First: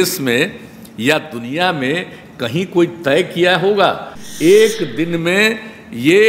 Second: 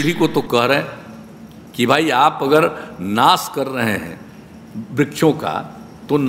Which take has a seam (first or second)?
first